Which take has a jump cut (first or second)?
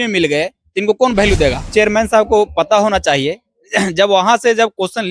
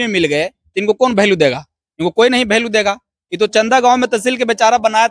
first